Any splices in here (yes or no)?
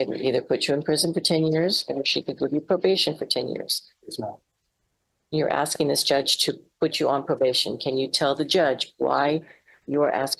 no